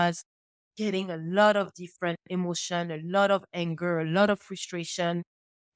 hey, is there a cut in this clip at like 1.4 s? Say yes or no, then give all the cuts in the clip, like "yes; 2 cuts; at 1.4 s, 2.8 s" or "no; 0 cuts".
no; 0 cuts